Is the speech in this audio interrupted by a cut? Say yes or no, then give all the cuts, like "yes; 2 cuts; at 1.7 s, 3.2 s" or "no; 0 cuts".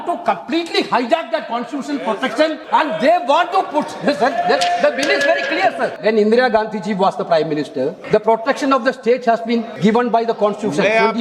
yes; 4 cuts; at 2.6 s, 6.0 s, 8.0 s, 9.7 s